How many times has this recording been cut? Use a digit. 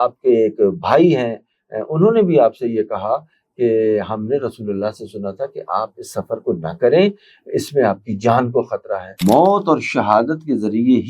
1